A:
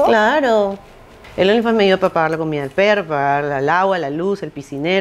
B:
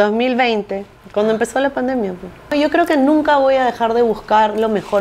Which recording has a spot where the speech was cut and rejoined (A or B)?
B